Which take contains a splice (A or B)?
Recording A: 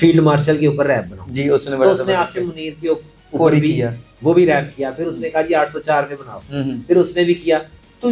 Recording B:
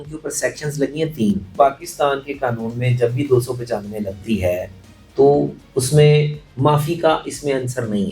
B